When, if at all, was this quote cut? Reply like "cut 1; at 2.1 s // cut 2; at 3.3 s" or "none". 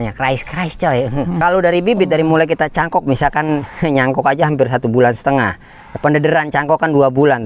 cut 1; at 1.4 s